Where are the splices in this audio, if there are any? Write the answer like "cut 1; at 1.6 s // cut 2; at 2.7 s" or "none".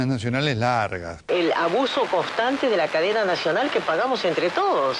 cut 1; at 1.1 s